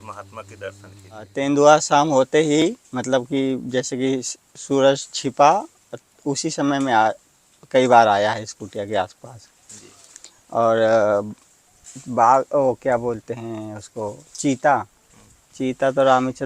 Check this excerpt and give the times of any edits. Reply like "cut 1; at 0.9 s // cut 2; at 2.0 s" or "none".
cut 1; at 1.3 s

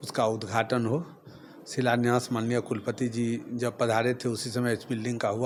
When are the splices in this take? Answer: none

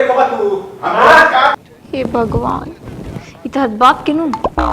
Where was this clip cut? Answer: cut 1; at 1.9 s

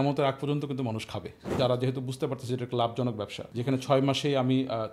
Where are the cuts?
cut 1; at 1.4 s // cut 2; at 3.6 s

